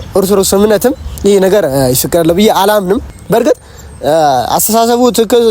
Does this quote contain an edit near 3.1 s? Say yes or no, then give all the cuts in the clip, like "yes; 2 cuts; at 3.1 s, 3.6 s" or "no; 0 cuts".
yes; 1 cut; at 3.1 s